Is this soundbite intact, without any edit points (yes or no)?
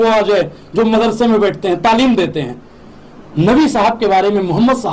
yes